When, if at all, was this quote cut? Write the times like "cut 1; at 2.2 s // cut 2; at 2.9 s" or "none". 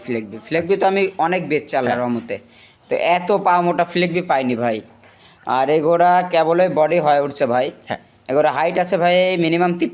none